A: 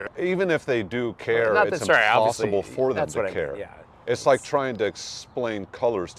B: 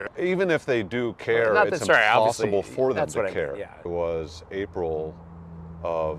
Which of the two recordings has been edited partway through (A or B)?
B